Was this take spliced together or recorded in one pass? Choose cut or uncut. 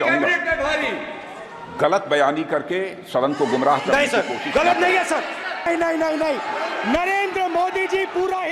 cut